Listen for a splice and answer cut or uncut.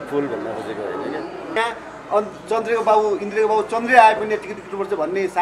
cut